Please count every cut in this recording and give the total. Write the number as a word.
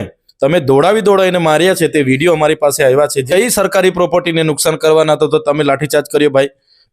one